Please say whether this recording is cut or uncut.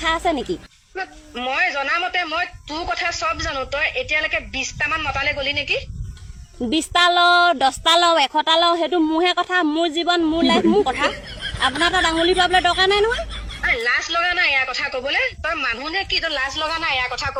uncut